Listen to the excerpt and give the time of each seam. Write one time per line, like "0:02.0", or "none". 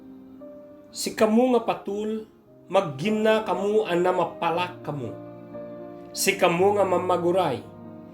0:00.9